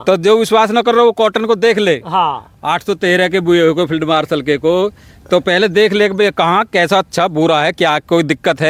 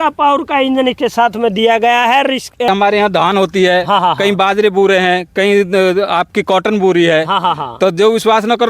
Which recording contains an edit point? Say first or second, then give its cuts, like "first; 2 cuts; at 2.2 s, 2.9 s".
second; 1 cut; at 2.7 s